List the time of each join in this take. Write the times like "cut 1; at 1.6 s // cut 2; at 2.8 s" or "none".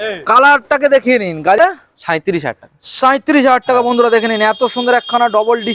cut 1; at 1.6 s